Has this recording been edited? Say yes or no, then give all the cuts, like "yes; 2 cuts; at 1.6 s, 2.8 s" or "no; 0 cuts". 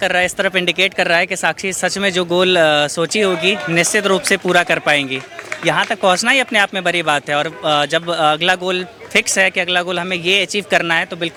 no; 0 cuts